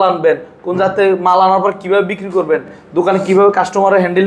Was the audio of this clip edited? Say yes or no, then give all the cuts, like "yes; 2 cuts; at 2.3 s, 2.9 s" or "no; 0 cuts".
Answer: no; 0 cuts